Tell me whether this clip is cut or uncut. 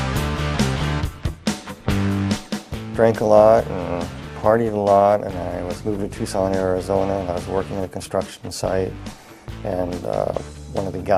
cut